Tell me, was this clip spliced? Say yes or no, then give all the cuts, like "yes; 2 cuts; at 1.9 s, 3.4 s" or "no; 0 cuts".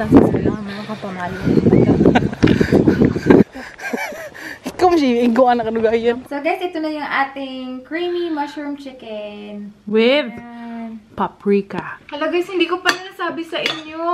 yes; 3 cuts; at 3.4 s, 6.2 s, 12.0 s